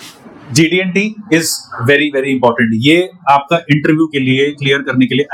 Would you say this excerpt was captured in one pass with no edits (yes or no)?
yes